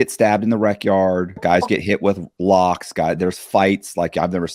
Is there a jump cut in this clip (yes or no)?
yes